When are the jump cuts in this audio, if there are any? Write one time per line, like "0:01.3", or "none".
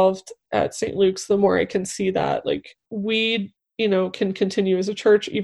0:02.8

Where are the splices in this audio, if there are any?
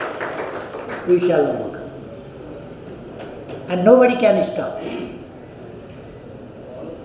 none

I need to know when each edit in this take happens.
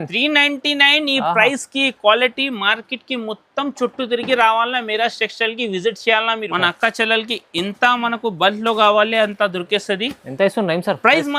0:06.5

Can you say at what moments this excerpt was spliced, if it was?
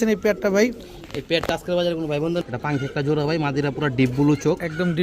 0:02.4

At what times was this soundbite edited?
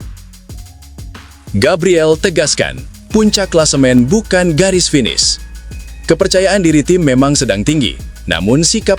0:01.5

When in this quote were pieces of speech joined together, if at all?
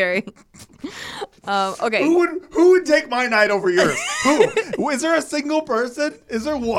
none

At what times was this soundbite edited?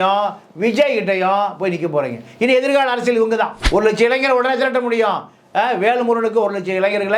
0:03.6

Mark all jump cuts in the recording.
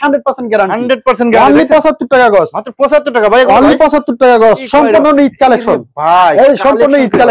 none

